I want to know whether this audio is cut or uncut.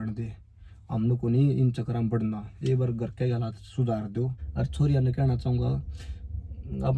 cut